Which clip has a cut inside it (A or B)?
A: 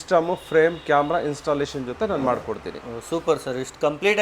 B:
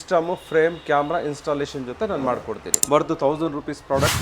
B